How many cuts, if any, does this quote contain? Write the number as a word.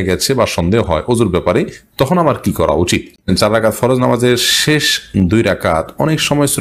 one